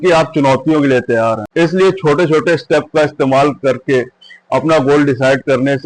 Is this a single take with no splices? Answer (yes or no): no